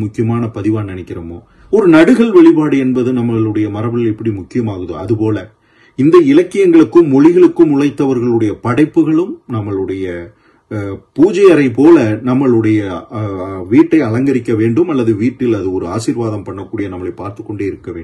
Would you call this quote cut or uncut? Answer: uncut